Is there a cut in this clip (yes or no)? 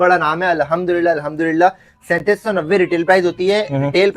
no